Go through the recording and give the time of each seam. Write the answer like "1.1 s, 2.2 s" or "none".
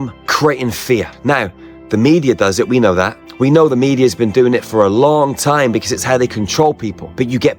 none